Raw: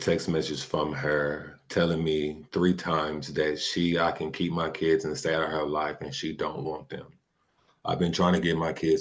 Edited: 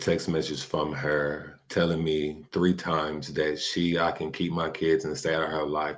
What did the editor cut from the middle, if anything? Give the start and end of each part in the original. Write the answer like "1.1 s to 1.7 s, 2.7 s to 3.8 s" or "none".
none

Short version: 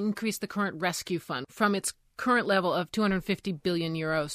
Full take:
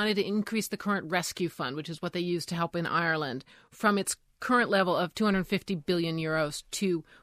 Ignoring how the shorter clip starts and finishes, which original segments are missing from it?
1.7 s to 3.6 s

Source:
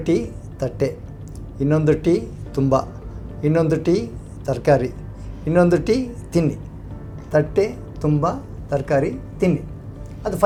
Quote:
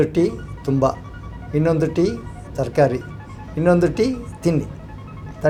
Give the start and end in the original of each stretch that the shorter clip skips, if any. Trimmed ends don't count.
none

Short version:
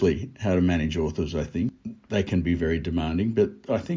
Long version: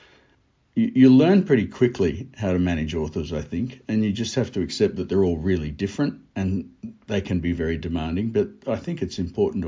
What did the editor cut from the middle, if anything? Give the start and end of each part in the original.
3.8 s to 6.8 s

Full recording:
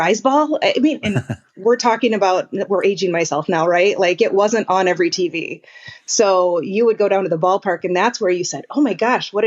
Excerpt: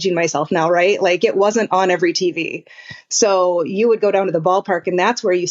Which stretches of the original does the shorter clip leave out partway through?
none

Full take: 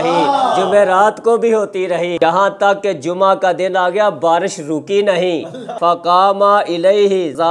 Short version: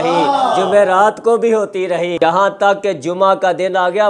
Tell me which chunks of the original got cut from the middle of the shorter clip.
none

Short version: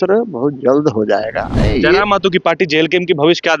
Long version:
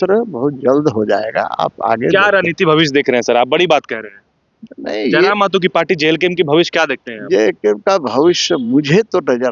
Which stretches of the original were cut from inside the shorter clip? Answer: 1.4 s to 4.7 s

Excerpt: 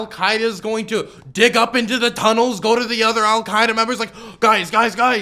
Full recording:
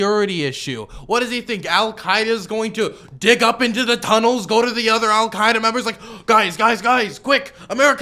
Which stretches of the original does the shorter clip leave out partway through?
none

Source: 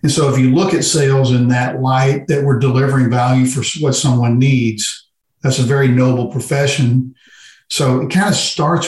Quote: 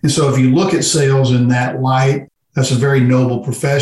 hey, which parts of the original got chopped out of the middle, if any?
2.2 s to 5.1 s

